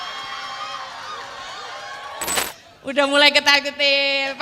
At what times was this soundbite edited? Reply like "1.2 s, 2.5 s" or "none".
2.5 s